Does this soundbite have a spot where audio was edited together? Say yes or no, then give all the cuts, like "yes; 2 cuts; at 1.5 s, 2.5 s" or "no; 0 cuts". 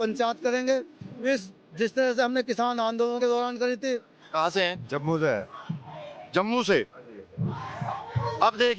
yes; 1 cut; at 4.2 s